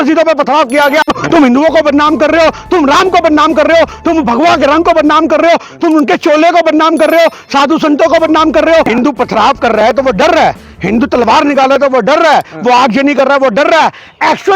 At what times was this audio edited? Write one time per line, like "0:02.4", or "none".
0:01.0
0:08.9